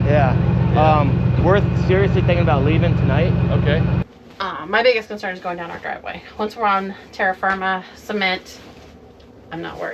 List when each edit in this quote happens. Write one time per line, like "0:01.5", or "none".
0:04.0